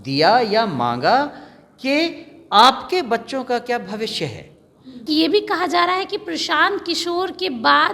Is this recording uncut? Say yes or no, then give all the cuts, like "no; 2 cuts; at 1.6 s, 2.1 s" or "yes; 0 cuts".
no; 1 cut; at 5.0 s